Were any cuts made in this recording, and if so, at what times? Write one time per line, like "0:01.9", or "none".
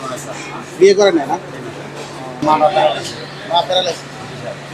0:02.4